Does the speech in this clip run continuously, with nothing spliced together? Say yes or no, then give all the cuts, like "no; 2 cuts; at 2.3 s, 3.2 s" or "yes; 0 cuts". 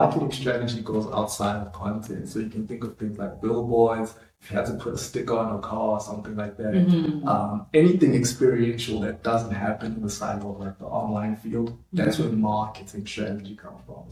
yes; 0 cuts